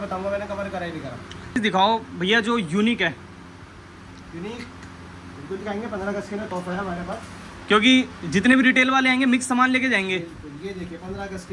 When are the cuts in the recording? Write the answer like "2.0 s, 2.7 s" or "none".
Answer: 1.6 s